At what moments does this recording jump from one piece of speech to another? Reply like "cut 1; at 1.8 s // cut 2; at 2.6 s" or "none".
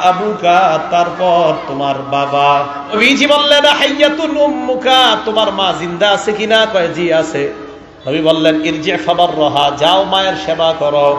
cut 1; at 3.0 s